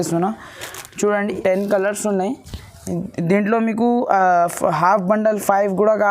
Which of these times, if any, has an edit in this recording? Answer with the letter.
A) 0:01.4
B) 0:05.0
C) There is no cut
A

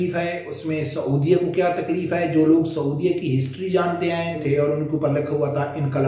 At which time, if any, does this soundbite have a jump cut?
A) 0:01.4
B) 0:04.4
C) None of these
B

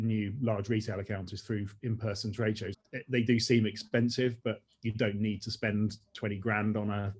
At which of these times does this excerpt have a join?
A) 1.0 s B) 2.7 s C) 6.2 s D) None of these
B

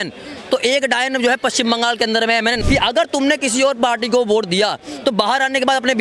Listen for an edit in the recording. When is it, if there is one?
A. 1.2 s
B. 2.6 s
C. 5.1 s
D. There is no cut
B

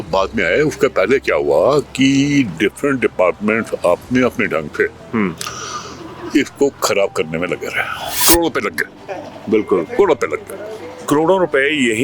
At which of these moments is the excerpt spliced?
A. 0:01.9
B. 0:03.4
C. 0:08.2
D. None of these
C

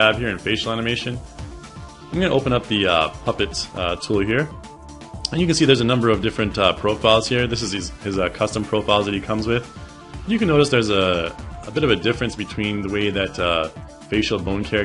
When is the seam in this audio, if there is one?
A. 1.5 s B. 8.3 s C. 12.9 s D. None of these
D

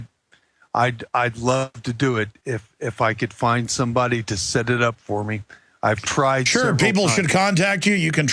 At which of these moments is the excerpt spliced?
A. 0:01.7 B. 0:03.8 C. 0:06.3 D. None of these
C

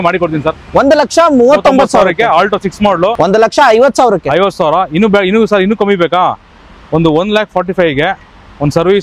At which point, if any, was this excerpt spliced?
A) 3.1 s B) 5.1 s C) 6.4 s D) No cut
A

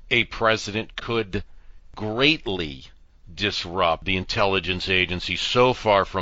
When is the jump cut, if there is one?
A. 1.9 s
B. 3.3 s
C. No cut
A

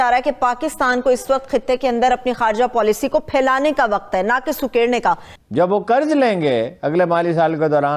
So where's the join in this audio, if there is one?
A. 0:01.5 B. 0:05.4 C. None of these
B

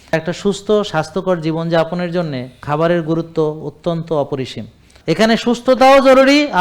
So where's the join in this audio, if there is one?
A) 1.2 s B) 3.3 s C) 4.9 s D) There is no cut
C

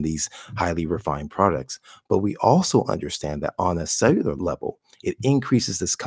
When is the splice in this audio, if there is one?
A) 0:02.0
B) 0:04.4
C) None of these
B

